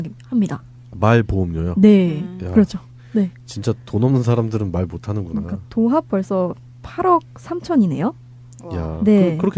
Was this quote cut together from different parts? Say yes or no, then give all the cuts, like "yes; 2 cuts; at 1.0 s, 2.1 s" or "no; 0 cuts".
no; 0 cuts